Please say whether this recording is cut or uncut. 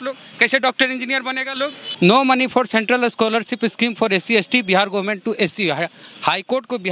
cut